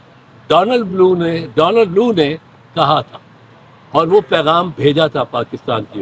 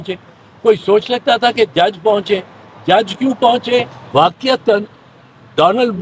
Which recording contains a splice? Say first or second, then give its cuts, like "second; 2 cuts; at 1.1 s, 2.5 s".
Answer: second; 1 cut; at 4.0 s